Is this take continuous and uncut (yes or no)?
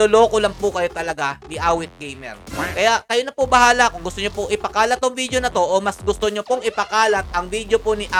yes